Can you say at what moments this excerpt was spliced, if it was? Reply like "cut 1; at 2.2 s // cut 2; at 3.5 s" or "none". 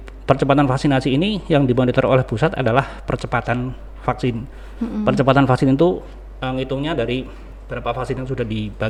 none